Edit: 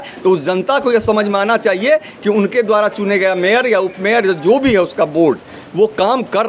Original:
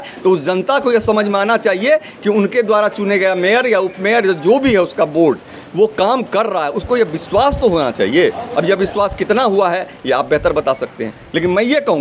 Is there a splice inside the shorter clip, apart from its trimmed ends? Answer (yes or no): no